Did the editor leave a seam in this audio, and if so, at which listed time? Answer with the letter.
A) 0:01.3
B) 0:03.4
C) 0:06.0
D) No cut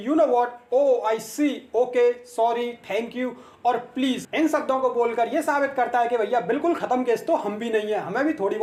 D